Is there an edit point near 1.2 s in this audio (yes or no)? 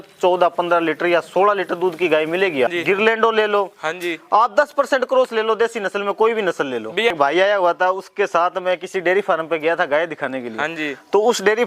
no